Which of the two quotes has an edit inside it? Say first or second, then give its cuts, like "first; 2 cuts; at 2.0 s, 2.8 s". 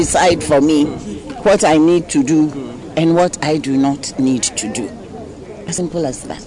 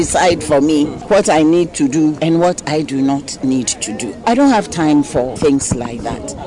second; 4 cuts; at 1.0 s, 2.2 s, 4.2 s, 5.3 s